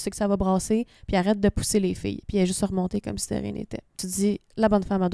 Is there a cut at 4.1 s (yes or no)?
yes